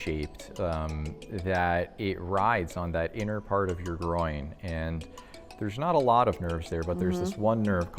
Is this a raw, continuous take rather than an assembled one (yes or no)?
yes